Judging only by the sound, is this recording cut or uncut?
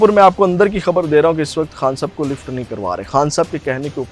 uncut